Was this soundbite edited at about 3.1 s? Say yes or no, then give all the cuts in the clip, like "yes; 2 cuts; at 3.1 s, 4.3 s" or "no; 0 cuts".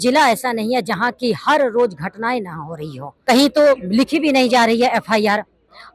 yes; 1 cut; at 3.1 s